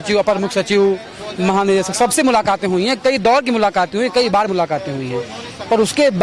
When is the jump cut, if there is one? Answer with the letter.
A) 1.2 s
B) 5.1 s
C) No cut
C